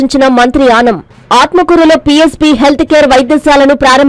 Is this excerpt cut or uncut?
uncut